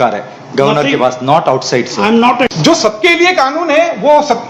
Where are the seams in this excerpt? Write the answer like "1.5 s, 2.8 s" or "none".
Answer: 2.2 s